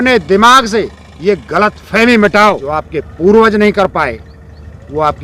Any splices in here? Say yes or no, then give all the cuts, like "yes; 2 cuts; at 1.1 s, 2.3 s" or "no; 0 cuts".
yes; 1 cut; at 2.7 s